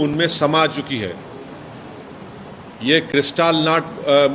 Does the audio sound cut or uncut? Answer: uncut